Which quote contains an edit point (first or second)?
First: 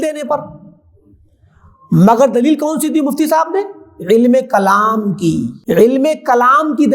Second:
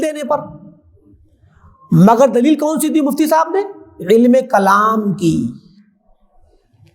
first